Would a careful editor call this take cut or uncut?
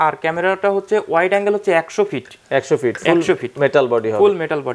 uncut